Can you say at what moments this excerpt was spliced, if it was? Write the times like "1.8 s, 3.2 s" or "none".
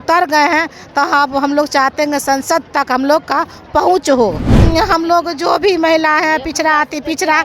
4.5 s